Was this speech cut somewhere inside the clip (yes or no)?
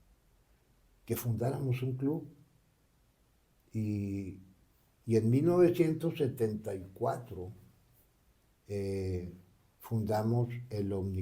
no